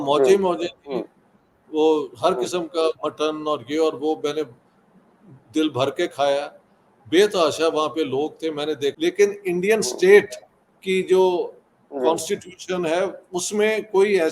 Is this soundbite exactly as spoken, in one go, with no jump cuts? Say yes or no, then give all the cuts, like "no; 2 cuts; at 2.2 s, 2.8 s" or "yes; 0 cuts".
no; 1 cut; at 9.0 s